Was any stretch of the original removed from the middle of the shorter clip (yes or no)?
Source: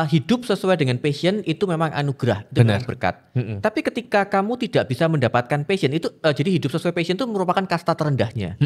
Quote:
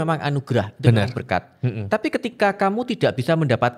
no